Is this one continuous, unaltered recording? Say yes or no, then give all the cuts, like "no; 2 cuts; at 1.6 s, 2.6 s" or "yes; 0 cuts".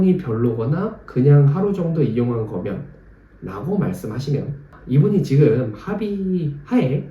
no; 1 cut; at 4.7 s